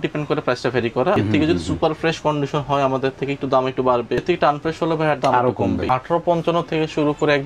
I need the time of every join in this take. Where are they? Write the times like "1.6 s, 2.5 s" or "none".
1.2 s, 4.2 s, 5.9 s